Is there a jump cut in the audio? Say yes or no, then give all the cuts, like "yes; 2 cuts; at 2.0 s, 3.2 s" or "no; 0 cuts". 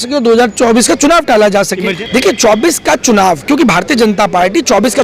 yes; 1 cut; at 1.9 s